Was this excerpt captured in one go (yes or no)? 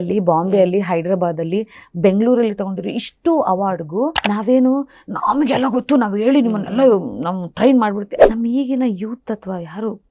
no